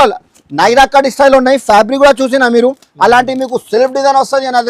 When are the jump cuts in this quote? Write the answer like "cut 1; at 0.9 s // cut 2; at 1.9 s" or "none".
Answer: none